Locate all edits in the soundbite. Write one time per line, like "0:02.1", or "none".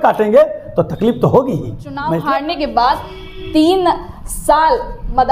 0:02.1